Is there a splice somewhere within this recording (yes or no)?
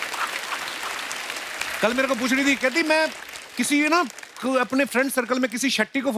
no